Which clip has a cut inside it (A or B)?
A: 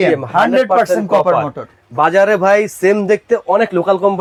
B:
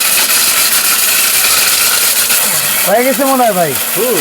B